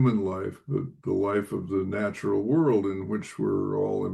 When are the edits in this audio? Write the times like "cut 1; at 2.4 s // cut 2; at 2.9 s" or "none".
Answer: cut 1; at 0.9 s